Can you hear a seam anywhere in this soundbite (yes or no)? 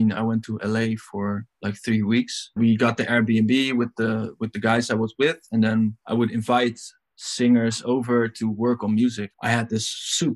yes